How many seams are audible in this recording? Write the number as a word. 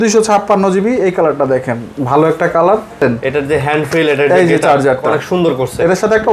one